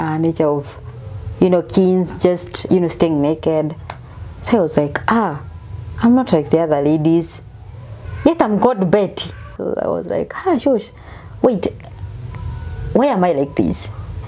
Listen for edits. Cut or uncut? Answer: cut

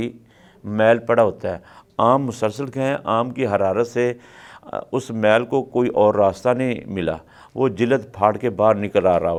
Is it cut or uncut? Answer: uncut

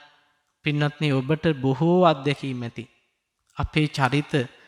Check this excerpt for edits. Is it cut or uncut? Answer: uncut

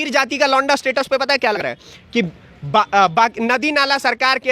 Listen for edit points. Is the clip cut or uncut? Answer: cut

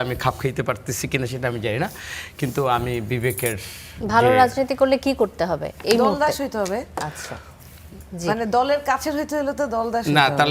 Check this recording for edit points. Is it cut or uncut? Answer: uncut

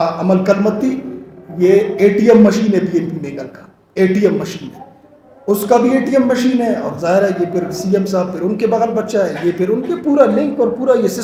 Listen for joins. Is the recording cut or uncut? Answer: uncut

